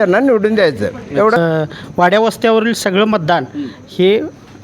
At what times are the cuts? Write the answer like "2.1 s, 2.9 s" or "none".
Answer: 1.4 s